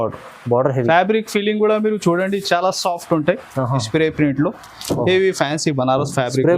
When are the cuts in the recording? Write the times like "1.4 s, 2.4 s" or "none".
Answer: 3.8 s